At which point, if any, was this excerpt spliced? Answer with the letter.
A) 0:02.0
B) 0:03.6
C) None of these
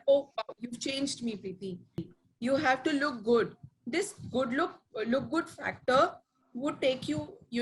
A